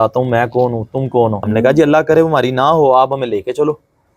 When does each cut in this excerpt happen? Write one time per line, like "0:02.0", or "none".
0:01.4